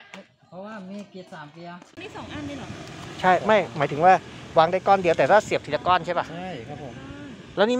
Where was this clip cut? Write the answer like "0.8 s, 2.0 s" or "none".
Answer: 2.1 s

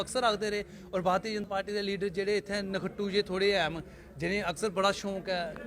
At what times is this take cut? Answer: 1.5 s

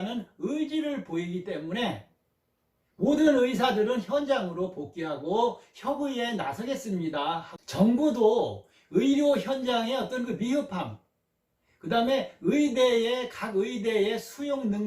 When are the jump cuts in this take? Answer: 7.5 s

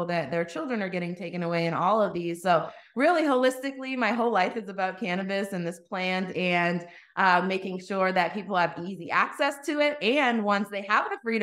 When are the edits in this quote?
none

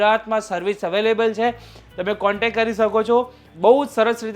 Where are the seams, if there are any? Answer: 3.5 s

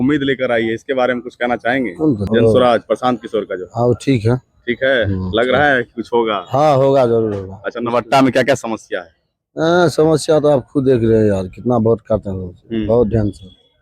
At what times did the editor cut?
2.2 s

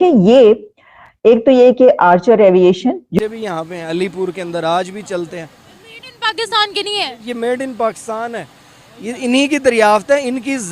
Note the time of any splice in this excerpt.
3.1 s

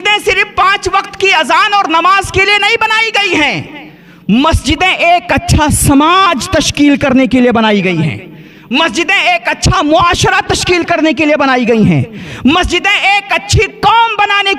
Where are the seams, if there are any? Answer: none

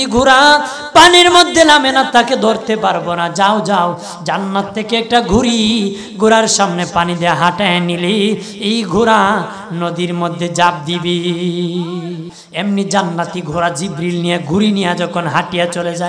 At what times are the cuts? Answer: 12.4 s

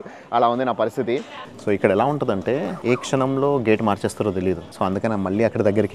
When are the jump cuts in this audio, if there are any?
1.4 s, 2.7 s, 4.7 s

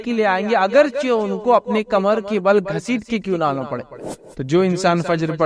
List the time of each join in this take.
4.0 s

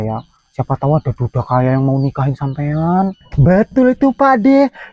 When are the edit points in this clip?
3.2 s

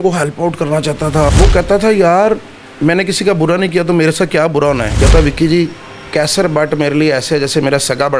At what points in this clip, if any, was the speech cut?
1.3 s, 5.0 s

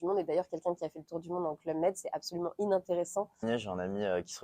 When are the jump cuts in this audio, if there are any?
3.4 s

